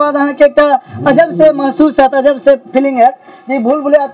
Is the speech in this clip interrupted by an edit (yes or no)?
no